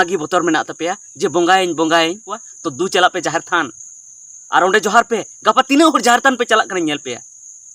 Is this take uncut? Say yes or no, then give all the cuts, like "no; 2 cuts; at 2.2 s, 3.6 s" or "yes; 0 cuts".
no; 1 cut; at 2.3 s